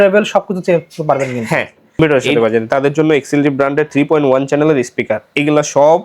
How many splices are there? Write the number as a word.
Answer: one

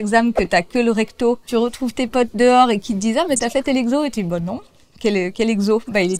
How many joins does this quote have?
one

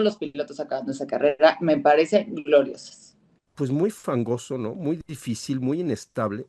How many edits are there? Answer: one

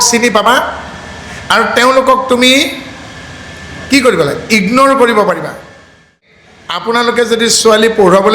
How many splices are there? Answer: one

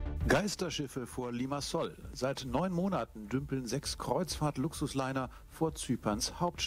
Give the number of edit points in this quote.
zero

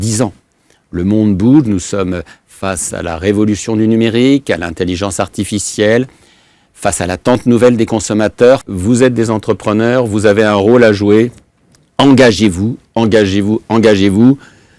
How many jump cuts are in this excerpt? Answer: one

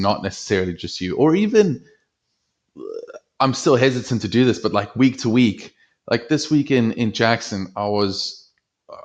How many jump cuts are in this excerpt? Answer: zero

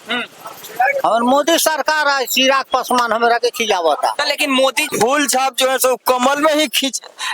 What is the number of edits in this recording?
one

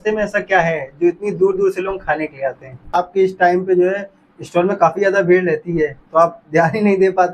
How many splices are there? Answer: one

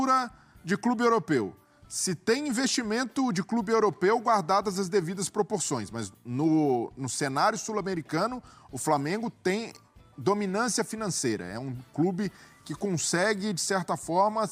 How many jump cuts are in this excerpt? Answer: zero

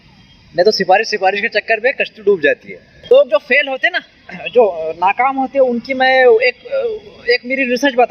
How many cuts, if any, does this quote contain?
one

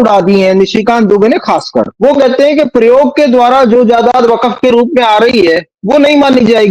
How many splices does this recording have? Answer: one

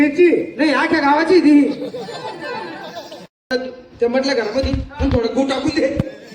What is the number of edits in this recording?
one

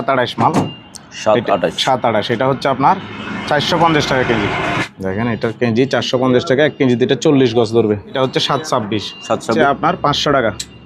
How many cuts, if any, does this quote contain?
three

